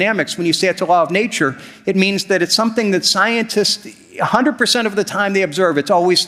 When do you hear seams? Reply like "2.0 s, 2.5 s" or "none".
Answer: none